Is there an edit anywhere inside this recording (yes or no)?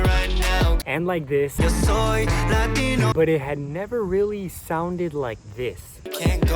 yes